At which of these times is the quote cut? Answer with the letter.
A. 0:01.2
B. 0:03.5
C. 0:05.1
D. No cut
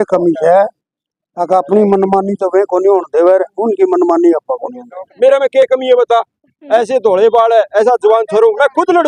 C